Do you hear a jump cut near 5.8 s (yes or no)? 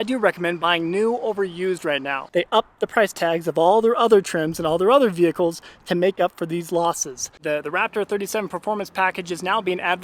no